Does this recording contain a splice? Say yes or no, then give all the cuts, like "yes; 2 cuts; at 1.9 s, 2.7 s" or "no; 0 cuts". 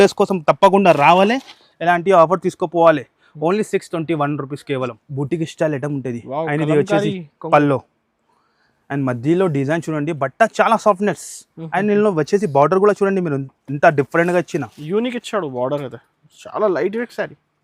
yes; 1 cut; at 5.0 s